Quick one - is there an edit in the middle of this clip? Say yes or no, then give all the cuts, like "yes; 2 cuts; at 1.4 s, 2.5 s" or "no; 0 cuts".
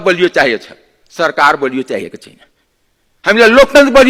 no; 0 cuts